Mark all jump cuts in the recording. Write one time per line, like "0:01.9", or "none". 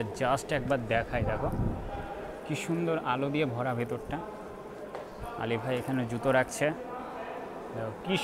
none